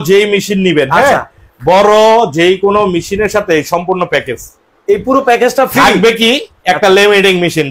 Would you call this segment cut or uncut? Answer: uncut